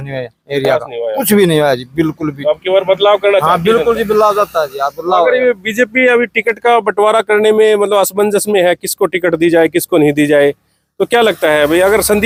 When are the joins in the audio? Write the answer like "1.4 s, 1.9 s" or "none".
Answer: none